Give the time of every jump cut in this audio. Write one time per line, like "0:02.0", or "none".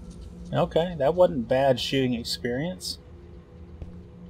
none